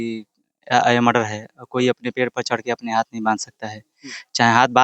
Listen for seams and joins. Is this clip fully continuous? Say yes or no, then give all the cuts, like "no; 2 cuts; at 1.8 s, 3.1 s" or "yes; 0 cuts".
yes; 0 cuts